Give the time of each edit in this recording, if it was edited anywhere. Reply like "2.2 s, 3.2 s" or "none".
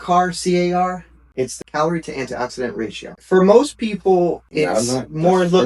1.5 s, 3.2 s, 4.4 s